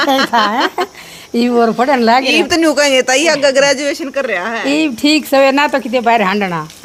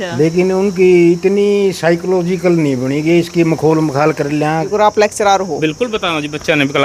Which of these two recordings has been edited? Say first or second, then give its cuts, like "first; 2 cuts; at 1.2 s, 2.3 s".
second; 1 cut; at 4.6 s